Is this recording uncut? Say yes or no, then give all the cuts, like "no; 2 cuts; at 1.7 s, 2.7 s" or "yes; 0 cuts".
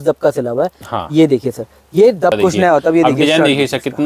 no; 1 cut; at 2.4 s